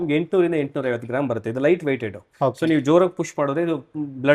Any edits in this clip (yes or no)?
no